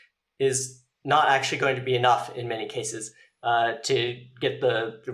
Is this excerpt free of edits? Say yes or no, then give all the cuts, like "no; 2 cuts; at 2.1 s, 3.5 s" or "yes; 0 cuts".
yes; 0 cuts